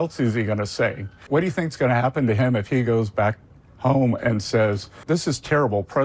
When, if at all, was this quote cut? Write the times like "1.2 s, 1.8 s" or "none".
1.3 s, 5.0 s